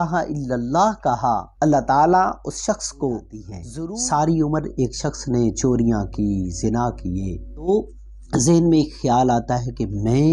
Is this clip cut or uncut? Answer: cut